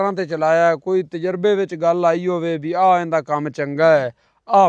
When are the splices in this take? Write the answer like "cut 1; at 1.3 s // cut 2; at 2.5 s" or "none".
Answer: none